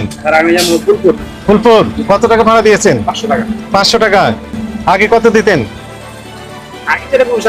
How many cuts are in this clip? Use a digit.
0